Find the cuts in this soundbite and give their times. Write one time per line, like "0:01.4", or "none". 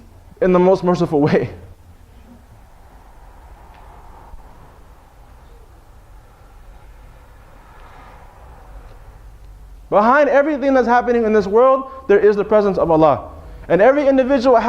0:09.7

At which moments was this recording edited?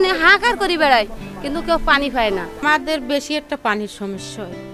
0:02.6

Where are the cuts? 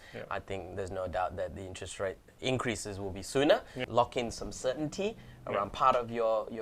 0:02.3
0:03.8

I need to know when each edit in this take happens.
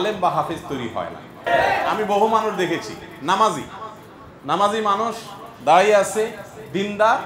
0:01.5

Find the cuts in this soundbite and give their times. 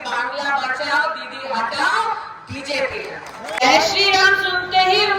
0:03.6

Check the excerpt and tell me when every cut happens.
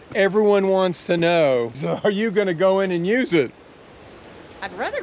0:01.9

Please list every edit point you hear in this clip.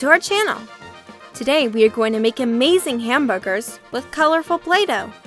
none

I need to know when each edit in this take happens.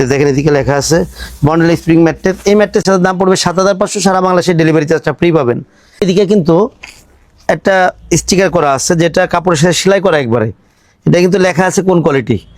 0:02.8
0:06.0

